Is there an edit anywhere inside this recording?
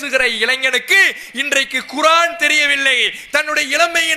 no; 0 cuts

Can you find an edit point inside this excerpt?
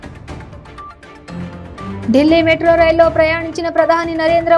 yes; 1 cut; at 2.0 s

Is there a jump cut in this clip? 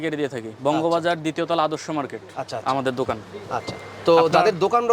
no; 0 cuts

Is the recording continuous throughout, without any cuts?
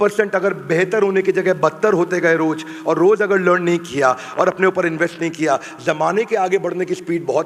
yes; 0 cuts

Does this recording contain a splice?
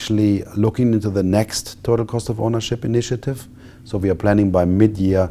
no; 0 cuts

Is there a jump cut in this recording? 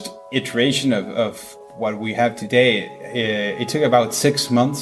yes; 1 cut; at 1.4 s

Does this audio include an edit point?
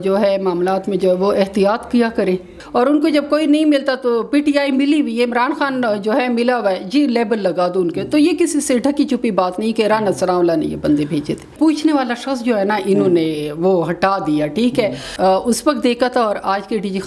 yes; 3 cuts; at 2.5 s, 11.5 s, 15.1 s

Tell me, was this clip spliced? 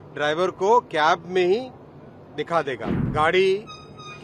yes; 1 cut; at 2.8 s

